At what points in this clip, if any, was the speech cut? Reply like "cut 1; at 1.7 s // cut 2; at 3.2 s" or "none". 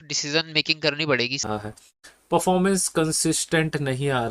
cut 1; at 1.5 s